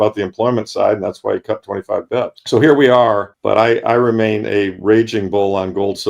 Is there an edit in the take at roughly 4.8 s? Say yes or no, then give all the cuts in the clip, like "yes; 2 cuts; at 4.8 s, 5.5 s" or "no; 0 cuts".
no; 2 cuts; at 2.4 s, 3.3 s